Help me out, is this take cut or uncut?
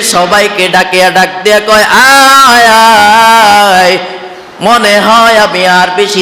uncut